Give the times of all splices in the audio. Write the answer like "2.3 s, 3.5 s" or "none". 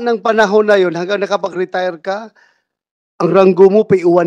none